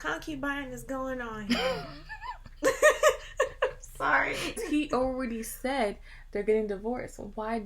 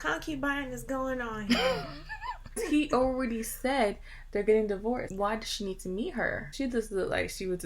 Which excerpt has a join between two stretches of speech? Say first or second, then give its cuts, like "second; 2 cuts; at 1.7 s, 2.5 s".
second; 3 cuts; at 2.5 s, 5.1 s, 6.5 s